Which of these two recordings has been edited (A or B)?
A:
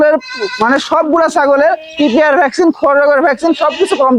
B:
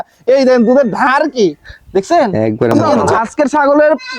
B